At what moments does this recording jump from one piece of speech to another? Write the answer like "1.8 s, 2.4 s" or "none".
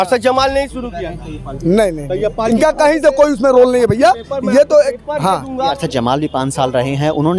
5.7 s